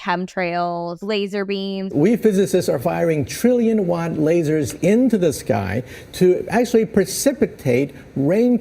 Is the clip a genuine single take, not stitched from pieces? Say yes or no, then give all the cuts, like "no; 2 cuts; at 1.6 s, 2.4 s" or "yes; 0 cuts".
no; 2 cuts; at 0.9 s, 1.9 s